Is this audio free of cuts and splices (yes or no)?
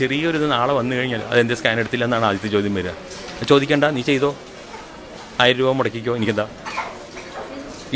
yes